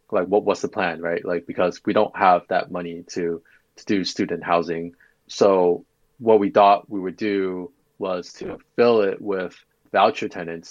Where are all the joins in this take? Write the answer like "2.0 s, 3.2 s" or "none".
9.8 s